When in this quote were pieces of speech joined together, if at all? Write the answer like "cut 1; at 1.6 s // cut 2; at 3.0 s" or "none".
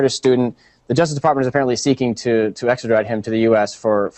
none